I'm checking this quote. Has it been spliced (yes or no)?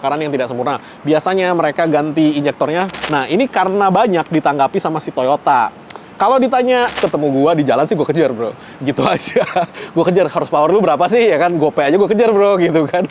yes